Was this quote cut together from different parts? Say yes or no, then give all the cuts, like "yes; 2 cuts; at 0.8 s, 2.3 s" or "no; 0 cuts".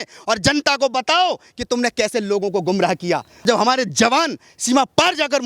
yes; 1 cut; at 3.4 s